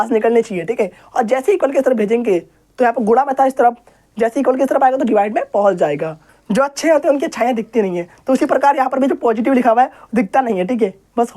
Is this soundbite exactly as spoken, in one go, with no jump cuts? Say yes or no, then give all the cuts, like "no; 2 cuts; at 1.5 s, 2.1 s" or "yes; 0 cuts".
no; 2 cuts; at 1.0 s, 6.4 s